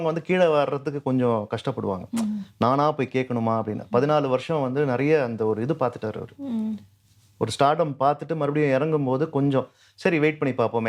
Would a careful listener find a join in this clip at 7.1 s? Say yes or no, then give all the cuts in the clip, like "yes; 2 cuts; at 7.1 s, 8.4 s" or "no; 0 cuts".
no; 0 cuts